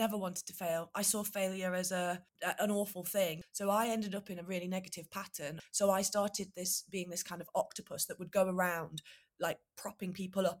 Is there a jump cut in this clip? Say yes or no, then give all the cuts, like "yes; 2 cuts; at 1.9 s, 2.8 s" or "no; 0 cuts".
yes; 3 cuts; at 2.3 s, 3.4 s, 5.6 s